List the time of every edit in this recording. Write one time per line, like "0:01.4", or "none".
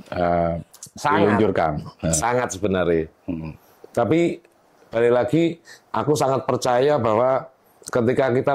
none